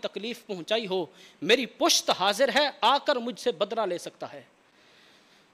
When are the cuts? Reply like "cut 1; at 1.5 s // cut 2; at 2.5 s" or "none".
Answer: none